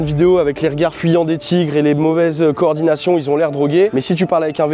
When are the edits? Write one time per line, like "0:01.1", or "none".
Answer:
none